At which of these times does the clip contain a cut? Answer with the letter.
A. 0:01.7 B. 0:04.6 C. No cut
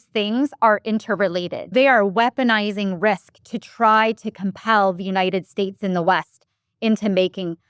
A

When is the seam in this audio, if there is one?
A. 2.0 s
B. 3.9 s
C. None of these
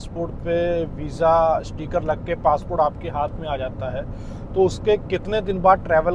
C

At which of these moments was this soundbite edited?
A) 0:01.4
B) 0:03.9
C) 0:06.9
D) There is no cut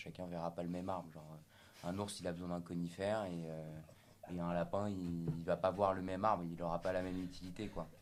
D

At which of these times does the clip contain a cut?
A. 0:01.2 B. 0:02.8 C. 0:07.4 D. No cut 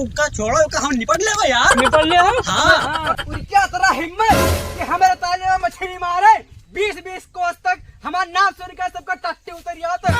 B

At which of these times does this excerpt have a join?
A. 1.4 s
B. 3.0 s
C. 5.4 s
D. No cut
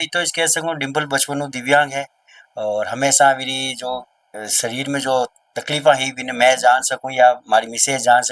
D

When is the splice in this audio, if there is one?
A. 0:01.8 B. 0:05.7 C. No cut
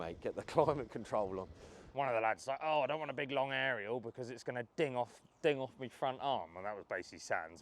A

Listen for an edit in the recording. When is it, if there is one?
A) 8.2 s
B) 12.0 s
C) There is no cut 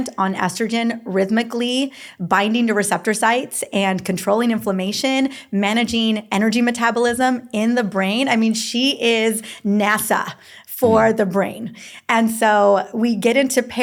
C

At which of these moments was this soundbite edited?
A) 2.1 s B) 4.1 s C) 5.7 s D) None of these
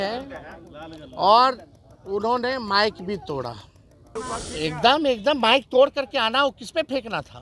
B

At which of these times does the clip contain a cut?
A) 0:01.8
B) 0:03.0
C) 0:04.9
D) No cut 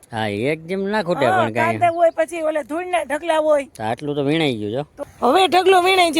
C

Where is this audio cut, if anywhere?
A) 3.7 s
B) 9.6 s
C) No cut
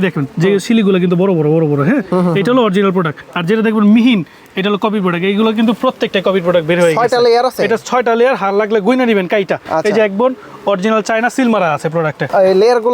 C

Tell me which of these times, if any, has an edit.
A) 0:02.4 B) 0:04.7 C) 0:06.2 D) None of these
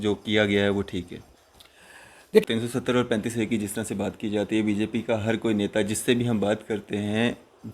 A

